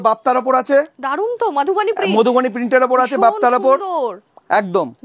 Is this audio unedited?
yes; 0 cuts

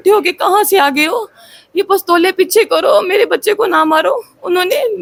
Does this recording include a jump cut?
no; 0 cuts

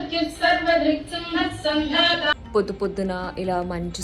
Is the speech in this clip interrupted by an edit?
yes; 1 cut; at 2.4 s

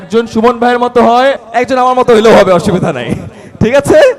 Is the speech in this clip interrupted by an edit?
yes; 1 cut; at 1.4 s

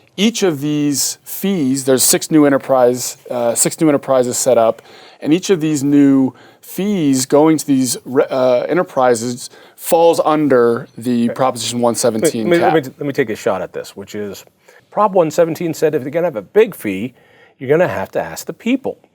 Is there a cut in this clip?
yes; 1 cut; at 14.8 s

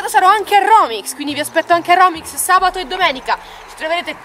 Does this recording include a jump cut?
no; 0 cuts

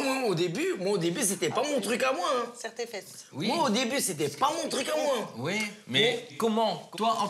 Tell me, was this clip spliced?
no; 0 cuts

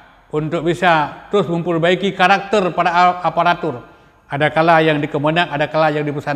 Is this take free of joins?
yes; 0 cuts

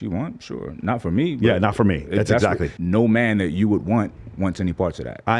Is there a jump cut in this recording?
yes; 1 cut; at 2.7 s

